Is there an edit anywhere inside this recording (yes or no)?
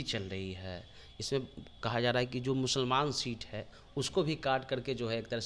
no